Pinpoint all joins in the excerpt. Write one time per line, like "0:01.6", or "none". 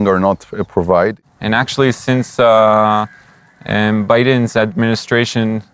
0:01.2